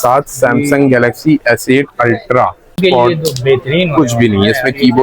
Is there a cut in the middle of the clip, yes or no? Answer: yes